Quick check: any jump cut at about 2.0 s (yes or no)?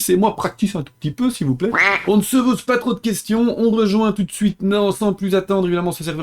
yes